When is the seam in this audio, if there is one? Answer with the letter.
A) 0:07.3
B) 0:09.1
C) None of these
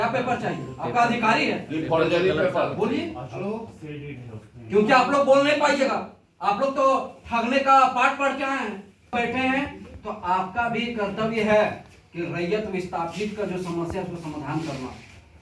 B